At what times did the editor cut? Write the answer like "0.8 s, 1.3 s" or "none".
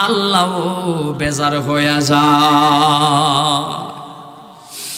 none